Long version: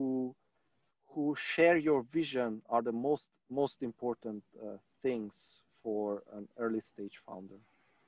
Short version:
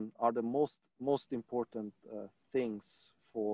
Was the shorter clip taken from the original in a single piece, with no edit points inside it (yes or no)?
yes